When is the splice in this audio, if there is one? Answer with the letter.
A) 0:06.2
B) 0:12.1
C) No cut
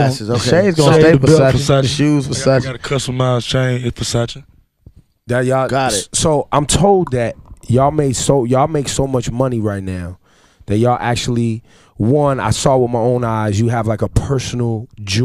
B